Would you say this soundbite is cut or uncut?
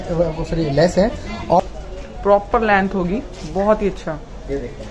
cut